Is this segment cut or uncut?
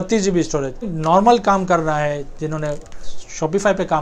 cut